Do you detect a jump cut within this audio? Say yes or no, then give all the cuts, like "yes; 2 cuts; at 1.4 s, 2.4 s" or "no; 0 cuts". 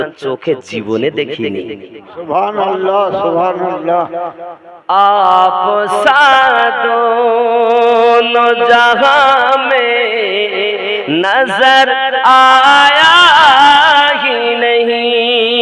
no; 0 cuts